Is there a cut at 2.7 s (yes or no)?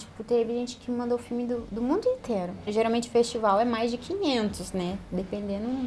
yes